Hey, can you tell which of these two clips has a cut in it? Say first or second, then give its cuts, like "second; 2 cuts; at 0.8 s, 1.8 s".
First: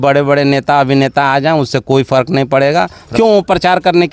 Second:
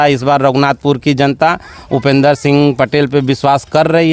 first; 1 cut; at 3.0 s